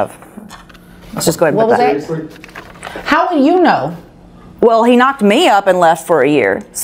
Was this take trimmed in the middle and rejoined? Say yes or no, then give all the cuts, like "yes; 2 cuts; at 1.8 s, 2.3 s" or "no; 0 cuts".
no; 0 cuts